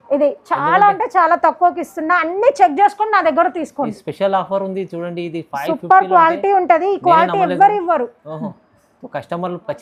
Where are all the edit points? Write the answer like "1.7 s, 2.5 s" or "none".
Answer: none